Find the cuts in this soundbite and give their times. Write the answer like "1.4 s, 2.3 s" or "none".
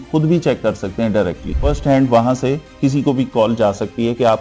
1.5 s